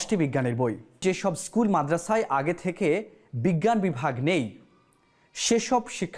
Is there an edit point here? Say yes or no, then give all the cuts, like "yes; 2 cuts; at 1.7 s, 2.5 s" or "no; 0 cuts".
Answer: yes; 1 cut; at 1.0 s